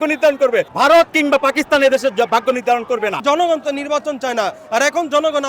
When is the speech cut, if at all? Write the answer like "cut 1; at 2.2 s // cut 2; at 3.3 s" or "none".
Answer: cut 1; at 3.2 s